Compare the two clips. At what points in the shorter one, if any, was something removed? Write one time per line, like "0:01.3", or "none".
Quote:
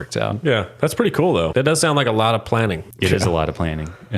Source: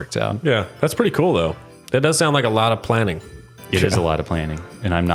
0:01.5
0:02.9